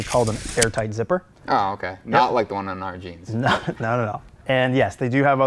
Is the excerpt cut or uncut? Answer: cut